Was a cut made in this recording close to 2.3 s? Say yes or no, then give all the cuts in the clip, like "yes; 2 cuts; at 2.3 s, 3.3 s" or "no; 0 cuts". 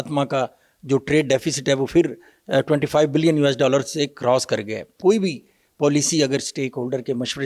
no; 1 cut; at 4.9 s